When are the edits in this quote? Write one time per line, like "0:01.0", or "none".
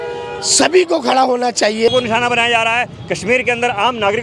0:01.9